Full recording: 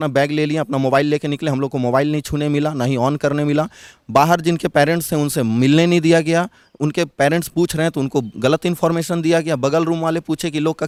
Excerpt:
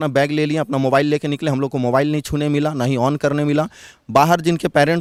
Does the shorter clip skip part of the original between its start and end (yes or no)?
no